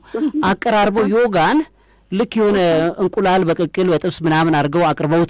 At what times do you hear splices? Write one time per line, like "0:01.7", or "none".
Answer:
none